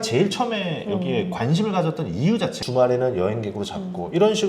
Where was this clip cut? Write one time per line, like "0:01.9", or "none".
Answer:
0:02.6